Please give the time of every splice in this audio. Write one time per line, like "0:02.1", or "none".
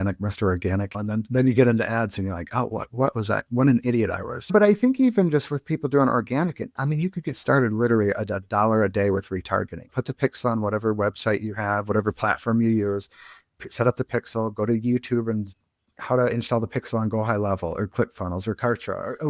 0:00.9
0:04.5
0:09.8